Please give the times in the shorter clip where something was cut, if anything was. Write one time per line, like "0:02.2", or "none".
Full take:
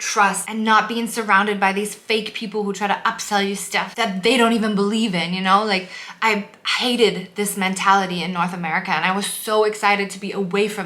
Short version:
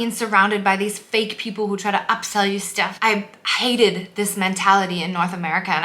0:02.9